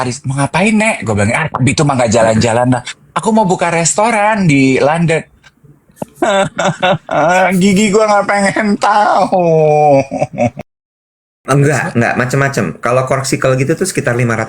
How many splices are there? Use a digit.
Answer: 1